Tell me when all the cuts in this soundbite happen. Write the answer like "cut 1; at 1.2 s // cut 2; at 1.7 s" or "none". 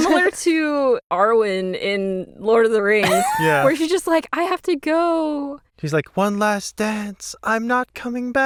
none